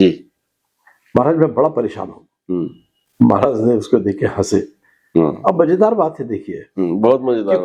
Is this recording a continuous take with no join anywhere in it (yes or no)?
yes